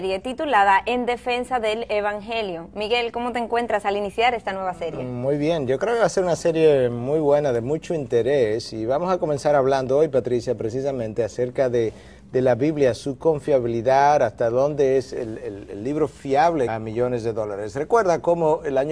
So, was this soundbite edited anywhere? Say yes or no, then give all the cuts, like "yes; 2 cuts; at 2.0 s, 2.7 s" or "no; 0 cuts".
no; 0 cuts